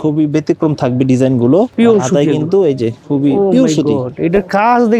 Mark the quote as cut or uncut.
cut